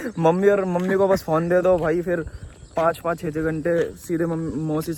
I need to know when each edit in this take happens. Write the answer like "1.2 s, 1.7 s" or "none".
none